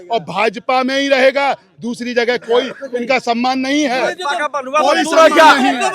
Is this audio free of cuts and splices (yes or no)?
yes